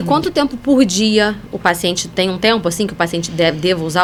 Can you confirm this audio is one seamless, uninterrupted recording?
yes; 0 cuts

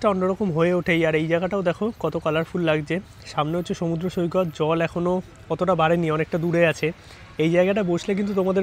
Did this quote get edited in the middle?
no; 0 cuts

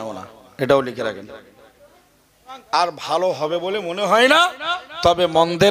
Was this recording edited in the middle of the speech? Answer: yes; 1 cut; at 2.5 s

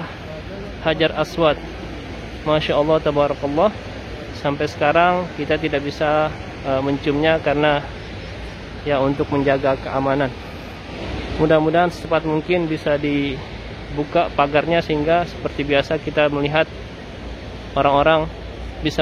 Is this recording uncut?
yes; 0 cuts

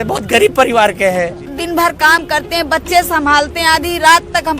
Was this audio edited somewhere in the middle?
yes; 1 cut; at 1.6 s

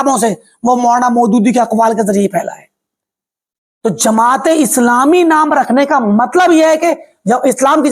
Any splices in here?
no; 0 cuts

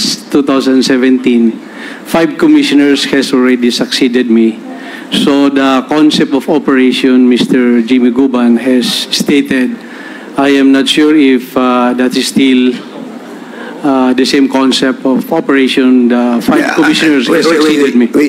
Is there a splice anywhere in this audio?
no; 0 cuts

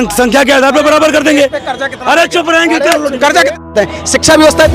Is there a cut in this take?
yes; 1 cut; at 3.7 s

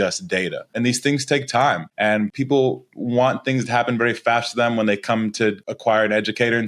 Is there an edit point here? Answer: yes; 3 cuts; at 0.8 s, 2.2 s, 5.7 s

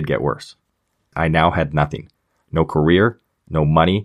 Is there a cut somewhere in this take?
yes; 1 cut; at 1.1 s

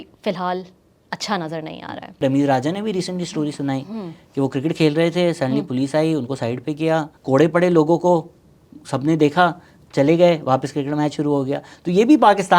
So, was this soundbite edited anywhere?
yes; 2 cuts; at 2.2 s, 7.1 s

